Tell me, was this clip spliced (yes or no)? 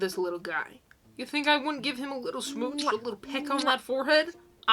no